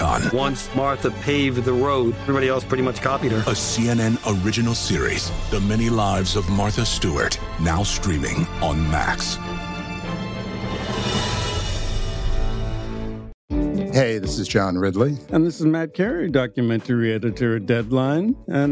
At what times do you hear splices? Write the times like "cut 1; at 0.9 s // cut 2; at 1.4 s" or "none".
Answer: cut 1; at 13.3 s